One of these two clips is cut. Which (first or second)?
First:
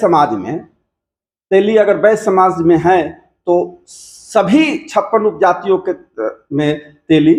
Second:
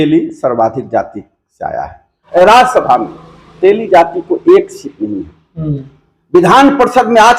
second